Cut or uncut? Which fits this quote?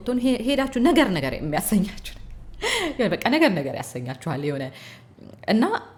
uncut